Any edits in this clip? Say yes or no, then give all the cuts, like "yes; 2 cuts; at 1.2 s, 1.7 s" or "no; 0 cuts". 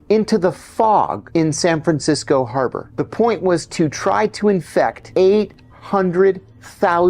yes; 3 cuts; at 1.2 s, 2.8 s, 5.0 s